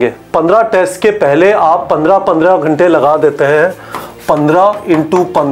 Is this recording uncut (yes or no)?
yes